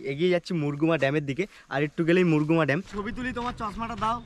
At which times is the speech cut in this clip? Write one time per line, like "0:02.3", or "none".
0:02.9